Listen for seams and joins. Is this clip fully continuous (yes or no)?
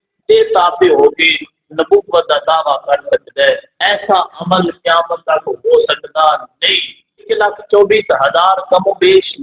no